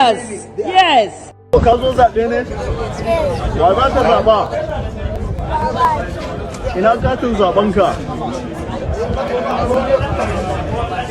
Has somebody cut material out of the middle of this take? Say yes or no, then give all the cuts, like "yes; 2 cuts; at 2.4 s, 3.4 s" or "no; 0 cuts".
yes; 1 cut; at 1.3 s